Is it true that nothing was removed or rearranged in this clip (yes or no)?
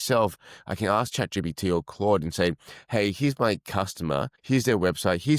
no